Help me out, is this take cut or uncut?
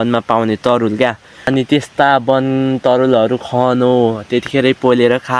cut